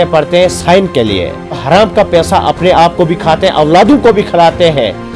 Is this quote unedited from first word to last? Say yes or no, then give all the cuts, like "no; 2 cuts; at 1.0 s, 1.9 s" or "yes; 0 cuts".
no; 1 cut; at 1.6 s